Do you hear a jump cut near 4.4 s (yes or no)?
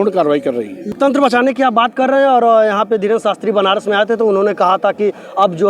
no